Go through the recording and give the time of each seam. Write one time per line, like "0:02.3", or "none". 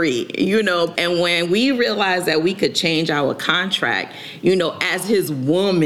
0:00.9